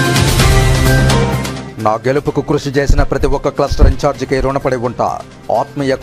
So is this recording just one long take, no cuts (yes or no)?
yes